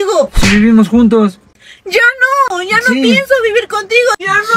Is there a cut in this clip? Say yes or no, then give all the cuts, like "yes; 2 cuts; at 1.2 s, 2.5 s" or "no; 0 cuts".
no; 0 cuts